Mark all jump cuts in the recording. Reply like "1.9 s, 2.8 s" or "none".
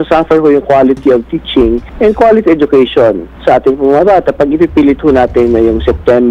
1.9 s, 3.3 s